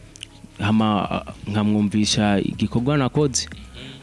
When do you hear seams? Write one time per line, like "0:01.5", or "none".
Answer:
none